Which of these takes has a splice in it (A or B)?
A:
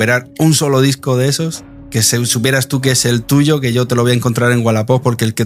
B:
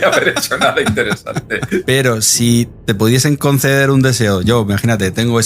B